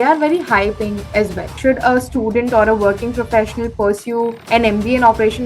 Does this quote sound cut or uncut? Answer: cut